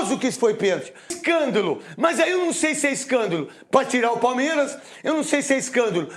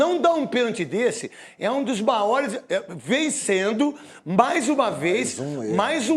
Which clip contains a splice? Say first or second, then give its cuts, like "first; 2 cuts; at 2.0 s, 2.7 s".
first; 1 cut; at 1.1 s